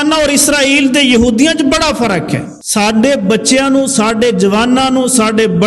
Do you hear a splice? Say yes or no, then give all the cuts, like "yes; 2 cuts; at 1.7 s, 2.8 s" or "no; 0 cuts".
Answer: yes; 1 cut; at 2.6 s